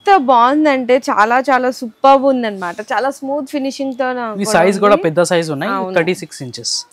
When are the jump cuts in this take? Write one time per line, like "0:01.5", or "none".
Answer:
none